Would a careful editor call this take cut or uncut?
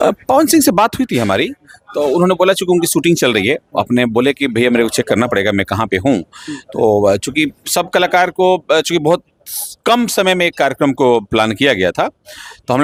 uncut